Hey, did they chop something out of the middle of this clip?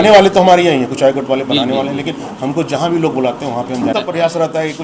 yes; 1 cut; at 3.9 s

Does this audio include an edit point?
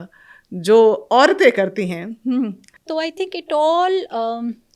yes; 1 cut; at 2.7 s

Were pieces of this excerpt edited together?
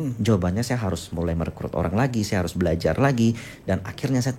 no; 0 cuts

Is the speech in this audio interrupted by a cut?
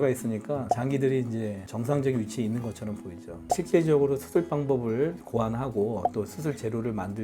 yes; 1 cut; at 3.3 s

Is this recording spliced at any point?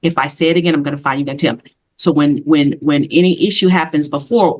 no; 0 cuts

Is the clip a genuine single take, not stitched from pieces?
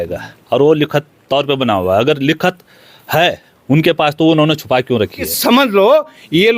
no; 1 cut; at 5.3 s

